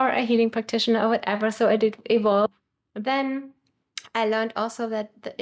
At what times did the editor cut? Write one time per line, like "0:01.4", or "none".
0:02.5